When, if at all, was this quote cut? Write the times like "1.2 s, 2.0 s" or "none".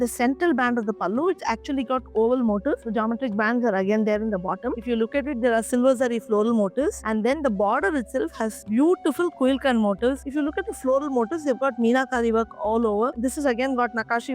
4.8 s, 10.2 s, 13.1 s

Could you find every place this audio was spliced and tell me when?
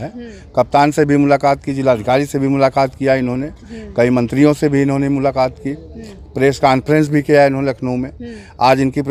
none

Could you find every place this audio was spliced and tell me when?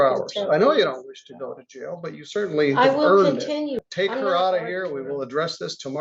3.8 s

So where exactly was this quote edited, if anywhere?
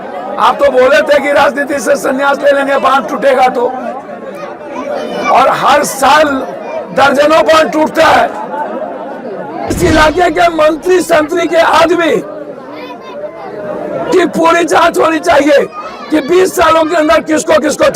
9.7 s

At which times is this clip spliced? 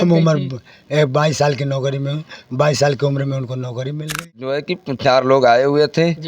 4.6 s

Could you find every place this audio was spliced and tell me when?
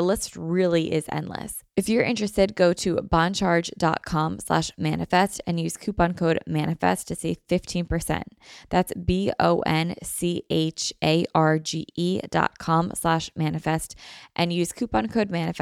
1.6 s

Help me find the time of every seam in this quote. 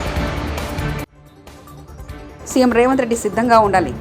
1.1 s

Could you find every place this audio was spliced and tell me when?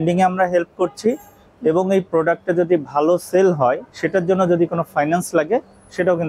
3.9 s

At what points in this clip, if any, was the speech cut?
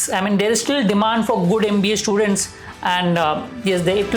none

